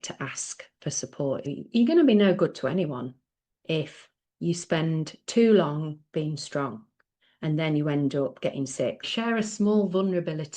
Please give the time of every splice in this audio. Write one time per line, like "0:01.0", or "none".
0:01.4
0:09.1